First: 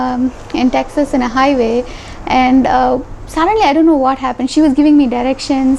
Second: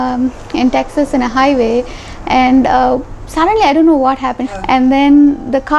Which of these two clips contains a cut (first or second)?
second